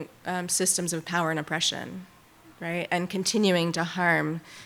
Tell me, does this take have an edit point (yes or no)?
no